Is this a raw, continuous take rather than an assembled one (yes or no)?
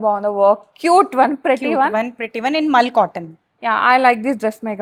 yes